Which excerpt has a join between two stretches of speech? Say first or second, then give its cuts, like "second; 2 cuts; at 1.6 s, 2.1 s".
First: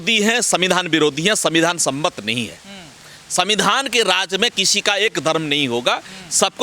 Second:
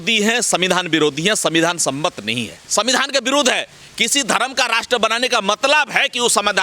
second; 1 cut; at 2.6 s